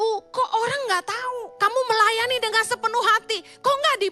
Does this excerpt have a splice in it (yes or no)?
yes